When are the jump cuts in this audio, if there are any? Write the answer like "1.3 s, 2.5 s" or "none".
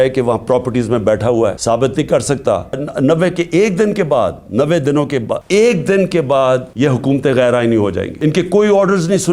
1.6 s, 2.9 s, 5.4 s, 6.7 s, 8.1 s